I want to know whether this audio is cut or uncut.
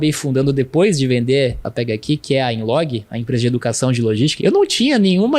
cut